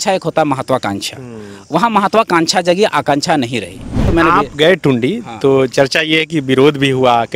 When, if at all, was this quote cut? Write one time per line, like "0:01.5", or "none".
0:04.0